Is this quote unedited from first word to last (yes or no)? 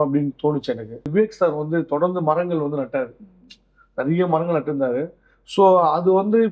no